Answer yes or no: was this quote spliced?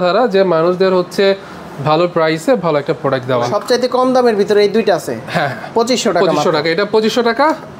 yes